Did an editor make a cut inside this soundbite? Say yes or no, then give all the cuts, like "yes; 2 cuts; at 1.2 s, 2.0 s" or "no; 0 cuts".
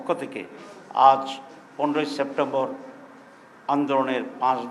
no; 0 cuts